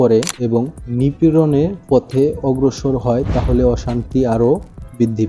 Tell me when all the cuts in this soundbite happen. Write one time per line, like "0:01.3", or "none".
none